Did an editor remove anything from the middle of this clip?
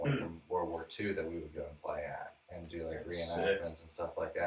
no; 0 cuts

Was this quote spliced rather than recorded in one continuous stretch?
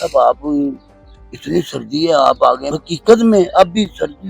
yes; 1 cut; at 2.7 s

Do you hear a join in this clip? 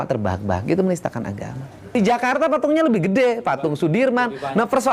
yes; 1 cut; at 1.9 s

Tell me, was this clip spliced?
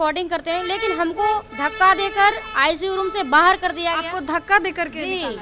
no; 0 cuts

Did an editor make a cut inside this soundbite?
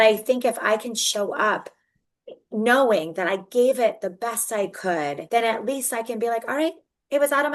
yes; 1 cut; at 5.2 s

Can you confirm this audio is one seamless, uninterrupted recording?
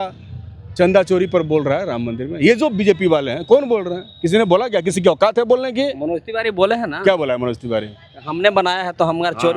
yes; 0 cuts

